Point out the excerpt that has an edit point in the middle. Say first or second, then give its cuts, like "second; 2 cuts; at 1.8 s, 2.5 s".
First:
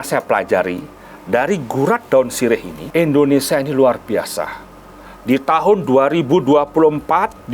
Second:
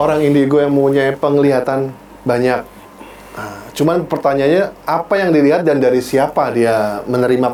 first; 1 cut; at 2.8 s